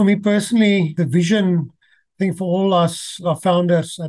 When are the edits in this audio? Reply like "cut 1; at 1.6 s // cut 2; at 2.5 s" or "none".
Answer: cut 1; at 0.9 s // cut 2; at 3.2 s